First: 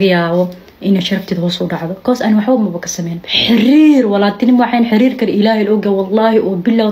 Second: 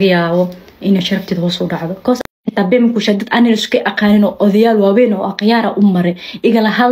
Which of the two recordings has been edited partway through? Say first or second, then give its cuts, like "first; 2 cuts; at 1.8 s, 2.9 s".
second; 1 cut; at 2.3 s